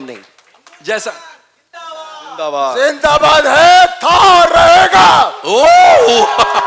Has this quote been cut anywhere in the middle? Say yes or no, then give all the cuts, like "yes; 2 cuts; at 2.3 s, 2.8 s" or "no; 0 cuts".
no; 0 cuts